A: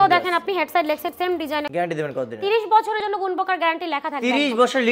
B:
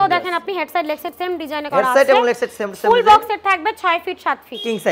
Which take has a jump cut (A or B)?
A